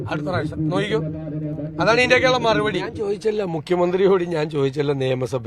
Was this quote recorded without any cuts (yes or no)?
no